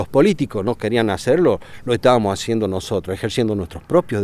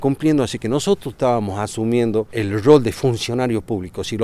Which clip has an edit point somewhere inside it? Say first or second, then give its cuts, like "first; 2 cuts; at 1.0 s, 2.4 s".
second; 1 cut; at 2.3 s